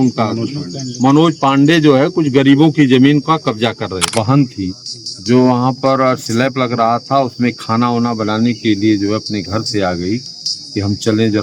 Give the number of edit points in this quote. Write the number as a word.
one